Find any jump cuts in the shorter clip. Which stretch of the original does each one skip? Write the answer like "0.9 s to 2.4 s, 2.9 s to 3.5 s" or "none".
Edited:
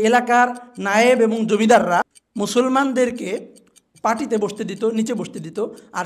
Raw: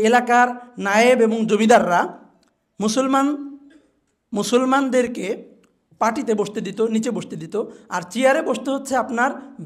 2.2 s to 4.2 s